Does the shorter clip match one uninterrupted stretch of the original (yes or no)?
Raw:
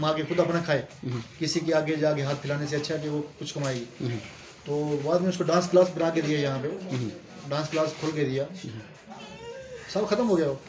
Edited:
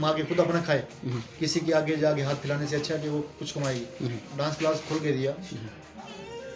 no